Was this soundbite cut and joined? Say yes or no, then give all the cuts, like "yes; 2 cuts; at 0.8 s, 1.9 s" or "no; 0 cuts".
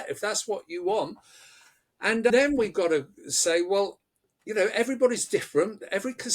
yes; 1 cut; at 2.3 s